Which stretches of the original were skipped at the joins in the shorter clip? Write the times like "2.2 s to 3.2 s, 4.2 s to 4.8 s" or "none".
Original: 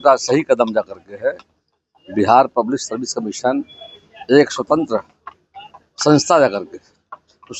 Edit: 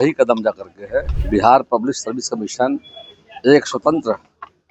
1.5 s to 2.0 s